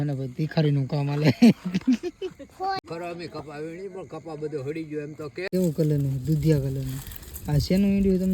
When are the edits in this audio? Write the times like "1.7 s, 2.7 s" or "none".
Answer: 2.8 s, 5.5 s

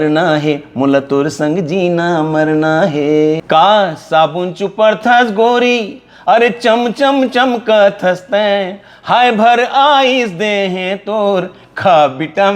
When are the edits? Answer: 3.4 s

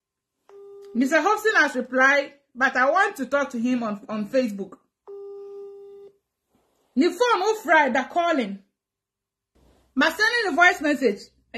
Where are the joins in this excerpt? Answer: none

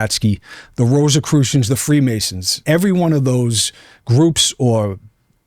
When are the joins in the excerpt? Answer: 2.5 s

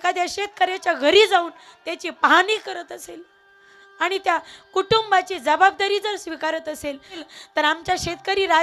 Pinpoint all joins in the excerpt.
7.2 s

